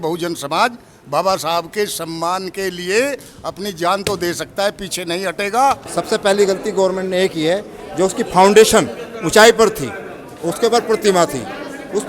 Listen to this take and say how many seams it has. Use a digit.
1